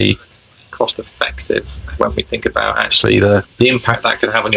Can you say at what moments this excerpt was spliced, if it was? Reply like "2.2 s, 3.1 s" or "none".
3.5 s